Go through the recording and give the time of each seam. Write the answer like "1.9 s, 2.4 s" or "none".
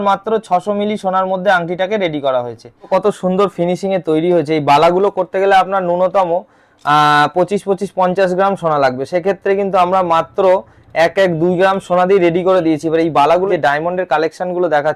2.9 s, 13.5 s